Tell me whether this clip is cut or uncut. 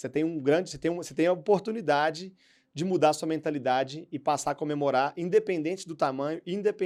uncut